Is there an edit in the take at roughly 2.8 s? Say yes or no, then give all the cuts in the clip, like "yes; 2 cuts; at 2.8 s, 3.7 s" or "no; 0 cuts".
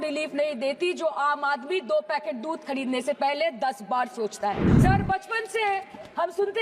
no; 1 cut; at 4.7 s